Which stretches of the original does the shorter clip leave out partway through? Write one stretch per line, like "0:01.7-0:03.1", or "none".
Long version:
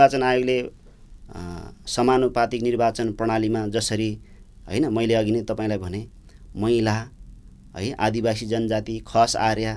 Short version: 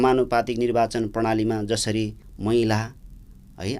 0:04.3-0:06.4